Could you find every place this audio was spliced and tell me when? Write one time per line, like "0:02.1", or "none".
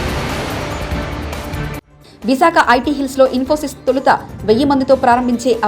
0:01.9